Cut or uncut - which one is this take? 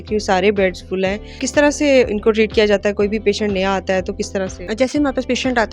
cut